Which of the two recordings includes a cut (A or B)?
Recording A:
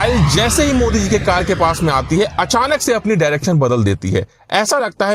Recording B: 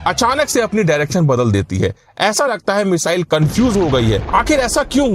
B